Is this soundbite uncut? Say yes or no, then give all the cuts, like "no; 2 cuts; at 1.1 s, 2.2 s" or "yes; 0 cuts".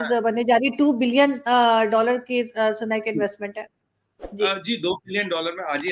yes; 0 cuts